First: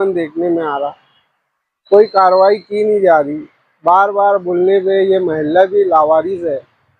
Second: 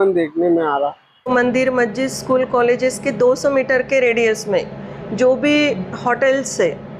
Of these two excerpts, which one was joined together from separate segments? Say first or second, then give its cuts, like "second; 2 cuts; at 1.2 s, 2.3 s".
second; 1 cut; at 1.3 s